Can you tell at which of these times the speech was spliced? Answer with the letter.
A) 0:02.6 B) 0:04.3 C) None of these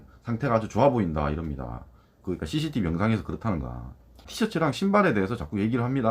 B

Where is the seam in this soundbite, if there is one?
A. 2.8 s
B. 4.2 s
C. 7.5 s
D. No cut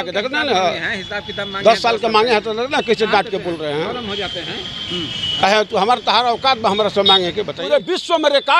C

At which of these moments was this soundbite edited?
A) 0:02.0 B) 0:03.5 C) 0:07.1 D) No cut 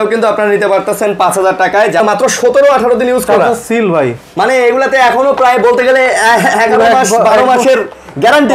A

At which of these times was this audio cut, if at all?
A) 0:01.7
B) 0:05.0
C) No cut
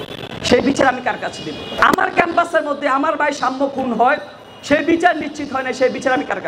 A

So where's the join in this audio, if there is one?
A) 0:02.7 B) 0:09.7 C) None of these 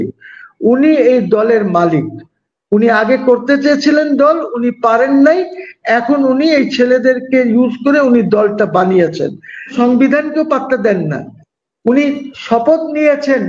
B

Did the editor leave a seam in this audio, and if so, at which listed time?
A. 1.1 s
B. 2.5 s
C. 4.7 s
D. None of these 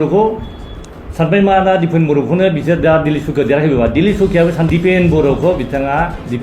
C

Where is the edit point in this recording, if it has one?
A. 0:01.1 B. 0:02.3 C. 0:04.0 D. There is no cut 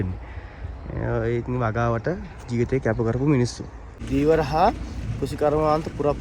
C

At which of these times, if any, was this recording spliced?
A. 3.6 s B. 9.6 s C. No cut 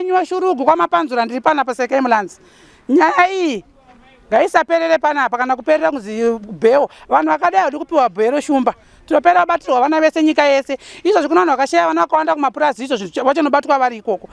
A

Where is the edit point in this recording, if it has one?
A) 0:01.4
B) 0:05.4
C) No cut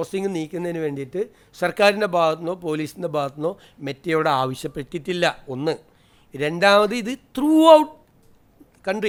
C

